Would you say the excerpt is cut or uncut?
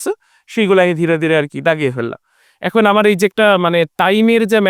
uncut